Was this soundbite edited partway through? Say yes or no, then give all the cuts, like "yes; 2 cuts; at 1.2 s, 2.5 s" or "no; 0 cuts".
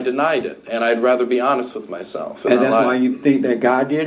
no; 0 cuts